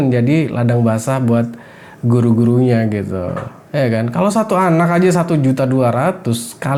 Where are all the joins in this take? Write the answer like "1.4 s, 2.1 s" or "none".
none